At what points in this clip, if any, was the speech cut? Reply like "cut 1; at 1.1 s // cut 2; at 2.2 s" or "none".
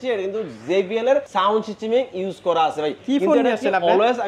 cut 1; at 1.3 s // cut 2; at 3.0 s